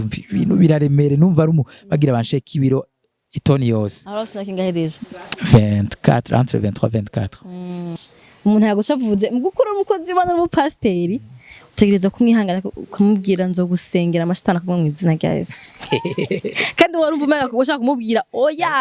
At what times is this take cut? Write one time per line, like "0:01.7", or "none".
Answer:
0:08.0